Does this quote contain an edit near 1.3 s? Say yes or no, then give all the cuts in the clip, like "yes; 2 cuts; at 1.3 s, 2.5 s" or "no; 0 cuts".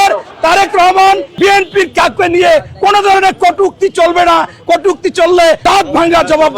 yes; 2 cuts; at 1.3 s, 5.6 s